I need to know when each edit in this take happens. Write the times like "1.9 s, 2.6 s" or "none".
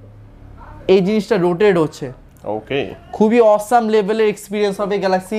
none